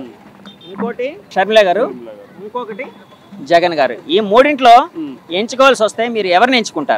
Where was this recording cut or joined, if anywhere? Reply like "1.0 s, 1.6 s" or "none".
1.3 s

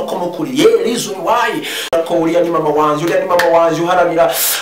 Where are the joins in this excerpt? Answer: 1.9 s

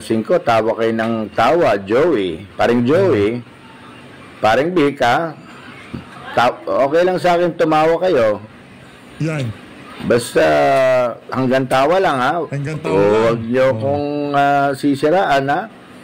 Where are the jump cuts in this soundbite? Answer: none

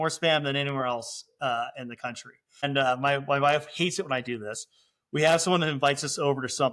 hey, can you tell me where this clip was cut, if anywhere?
2.7 s

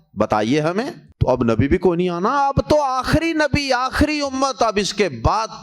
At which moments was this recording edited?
1.0 s

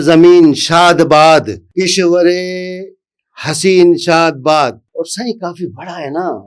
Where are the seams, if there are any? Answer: 1.6 s, 4.8 s

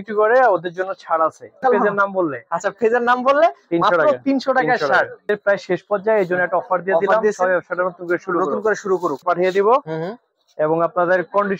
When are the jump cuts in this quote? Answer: 1.6 s, 5.3 s, 9.2 s

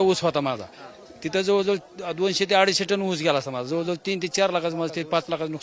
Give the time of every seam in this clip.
none

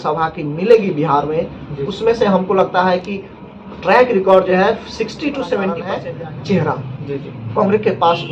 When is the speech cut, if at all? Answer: 5.9 s

